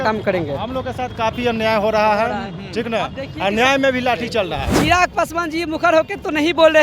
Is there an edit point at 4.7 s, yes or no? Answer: yes